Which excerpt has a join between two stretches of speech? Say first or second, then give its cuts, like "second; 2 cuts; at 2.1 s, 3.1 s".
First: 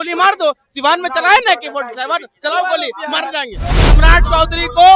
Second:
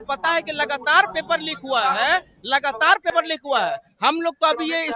first; 1 cut; at 3.9 s